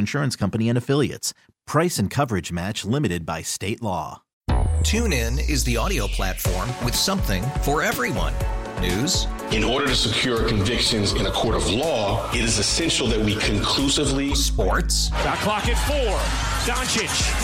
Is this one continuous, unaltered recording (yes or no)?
no